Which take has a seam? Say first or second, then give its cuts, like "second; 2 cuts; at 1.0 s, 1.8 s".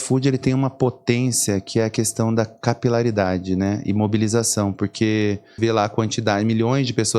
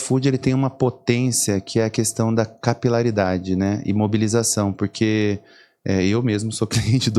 first; 1 cut; at 5.6 s